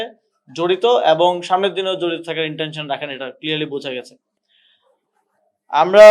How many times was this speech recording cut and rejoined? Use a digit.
0